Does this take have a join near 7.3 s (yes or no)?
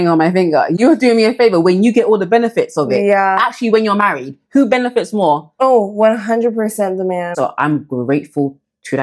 yes